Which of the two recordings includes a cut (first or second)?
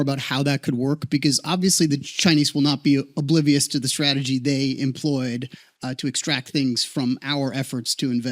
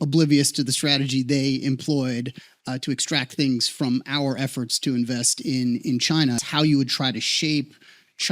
second